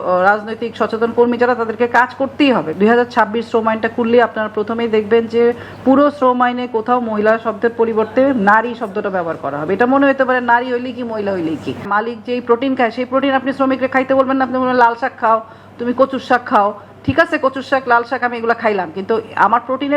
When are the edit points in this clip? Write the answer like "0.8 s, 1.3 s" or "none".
2.7 s, 11.9 s